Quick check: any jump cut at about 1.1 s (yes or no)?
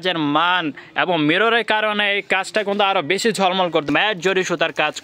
no